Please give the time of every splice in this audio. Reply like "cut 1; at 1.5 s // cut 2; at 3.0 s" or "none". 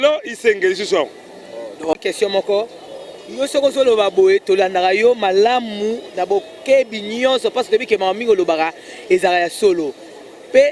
cut 1; at 1.9 s